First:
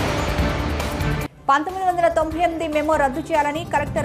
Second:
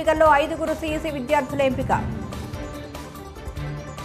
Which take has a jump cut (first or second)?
first